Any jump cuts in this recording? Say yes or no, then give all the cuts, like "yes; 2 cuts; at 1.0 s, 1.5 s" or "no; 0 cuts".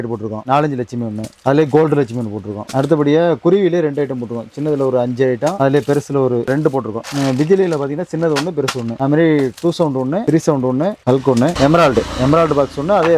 no; 0 cuts